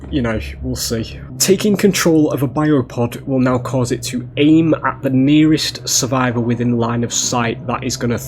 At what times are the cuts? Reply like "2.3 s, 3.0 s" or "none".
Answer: 1.2 s